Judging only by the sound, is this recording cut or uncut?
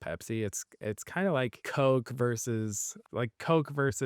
cut